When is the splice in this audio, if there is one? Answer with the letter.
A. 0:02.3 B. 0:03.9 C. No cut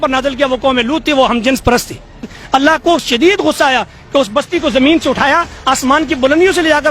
A